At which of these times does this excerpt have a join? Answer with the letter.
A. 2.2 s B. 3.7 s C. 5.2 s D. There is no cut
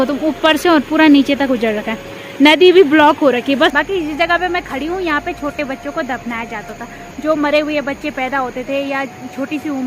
B